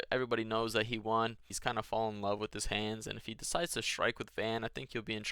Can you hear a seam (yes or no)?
yes